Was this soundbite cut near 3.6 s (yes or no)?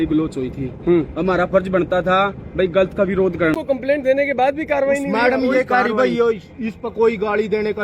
yes